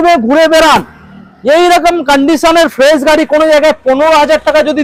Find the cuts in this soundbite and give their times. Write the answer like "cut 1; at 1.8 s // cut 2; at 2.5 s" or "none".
none